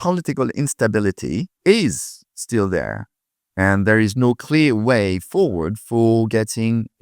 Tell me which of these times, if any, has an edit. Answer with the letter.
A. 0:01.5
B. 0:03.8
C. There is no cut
A